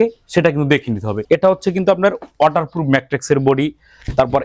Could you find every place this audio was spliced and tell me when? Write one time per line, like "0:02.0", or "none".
0:01.2